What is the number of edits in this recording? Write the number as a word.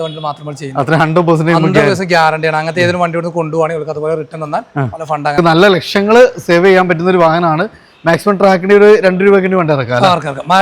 one